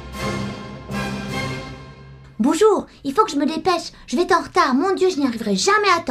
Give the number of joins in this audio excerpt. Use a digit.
1